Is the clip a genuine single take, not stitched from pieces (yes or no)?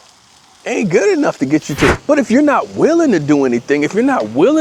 no